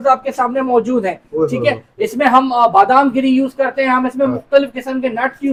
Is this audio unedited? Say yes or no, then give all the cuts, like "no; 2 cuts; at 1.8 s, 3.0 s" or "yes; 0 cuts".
yes; 0 cuts